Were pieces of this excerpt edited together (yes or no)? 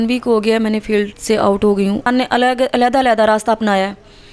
yes